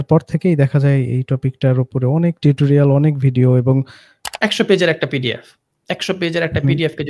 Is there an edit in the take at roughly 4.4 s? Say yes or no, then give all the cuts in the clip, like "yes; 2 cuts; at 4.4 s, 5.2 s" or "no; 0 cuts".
yes; 1 cut; at 4.4 s